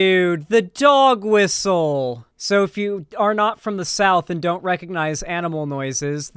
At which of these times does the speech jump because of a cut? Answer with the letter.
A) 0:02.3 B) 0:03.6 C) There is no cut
A